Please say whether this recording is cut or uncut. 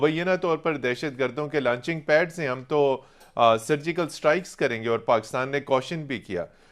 uncut